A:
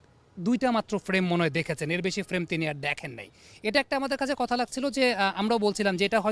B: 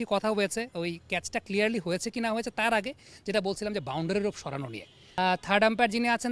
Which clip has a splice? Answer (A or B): B